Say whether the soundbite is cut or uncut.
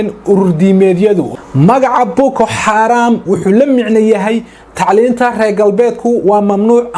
cut